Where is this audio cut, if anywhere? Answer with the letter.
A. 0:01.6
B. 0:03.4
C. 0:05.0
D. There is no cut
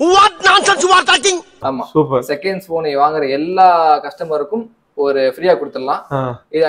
A